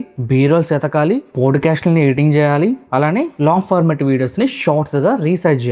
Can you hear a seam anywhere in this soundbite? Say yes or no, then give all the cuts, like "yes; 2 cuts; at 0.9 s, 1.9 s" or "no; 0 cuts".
no; 0 cuts